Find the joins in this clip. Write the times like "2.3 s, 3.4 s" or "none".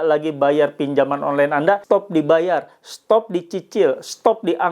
1.8 s